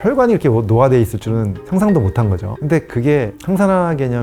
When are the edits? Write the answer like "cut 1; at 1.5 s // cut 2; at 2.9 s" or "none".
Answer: cut 1; at 2.5 s